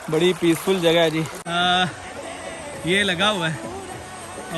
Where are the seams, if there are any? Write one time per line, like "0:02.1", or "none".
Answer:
0:01.4